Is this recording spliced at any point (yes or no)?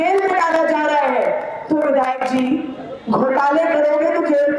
no